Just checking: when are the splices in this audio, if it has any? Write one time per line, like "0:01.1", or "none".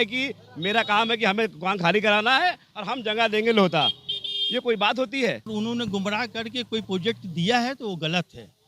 0:05.5